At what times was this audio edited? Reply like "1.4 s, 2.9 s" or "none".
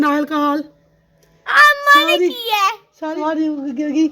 3.2 s